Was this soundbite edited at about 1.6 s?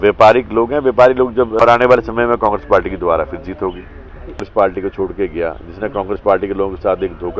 yes; 2 cuts; at 1.6 s, 4.4 s

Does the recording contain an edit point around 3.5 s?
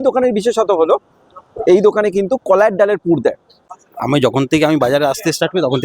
yes; 1 cut; at 3.5 s

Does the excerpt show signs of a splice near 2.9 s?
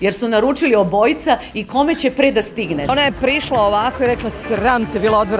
yes; 1 cut; at 2.9 s

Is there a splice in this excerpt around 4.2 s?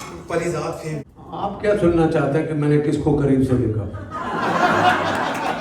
no; 1 cut; at 1.0 s

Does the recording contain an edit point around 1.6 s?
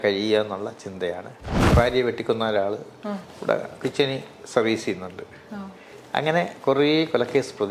yes; 1 cut; at 1.6 s

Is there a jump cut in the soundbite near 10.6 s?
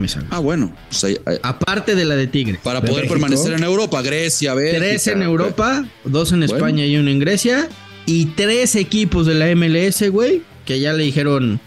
yes; 1 cut; at 10.6 s

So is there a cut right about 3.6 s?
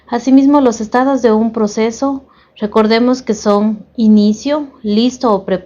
no; 1 cut; at 2.1 s

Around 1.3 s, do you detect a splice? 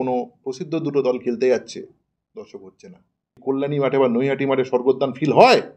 no; 1 cut; at 3.4 s

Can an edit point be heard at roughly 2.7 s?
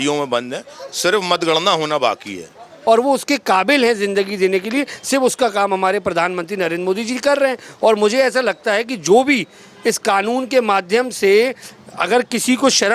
yes; 1 cut; at 2.7 s

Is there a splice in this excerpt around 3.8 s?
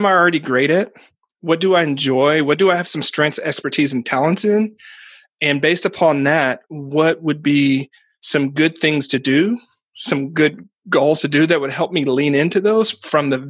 no; 0 cuts

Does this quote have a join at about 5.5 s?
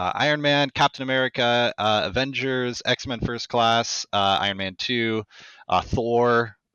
no; 0 cuts

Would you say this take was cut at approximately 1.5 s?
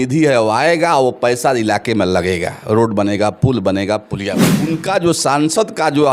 no; 1 cut; at 4.6 s

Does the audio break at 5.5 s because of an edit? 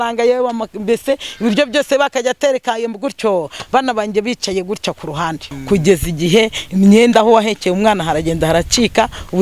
yes; 1 cut; at 5.5 s

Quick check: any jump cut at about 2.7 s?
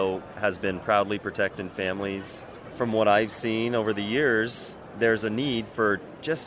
yes; 1 cut; at 2.7 s

